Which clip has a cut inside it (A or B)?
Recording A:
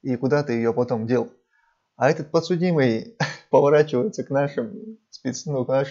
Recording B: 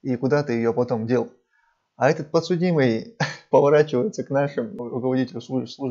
B